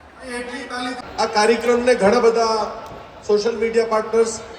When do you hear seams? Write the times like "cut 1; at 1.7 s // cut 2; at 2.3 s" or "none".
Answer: cut 1; at 1.0 s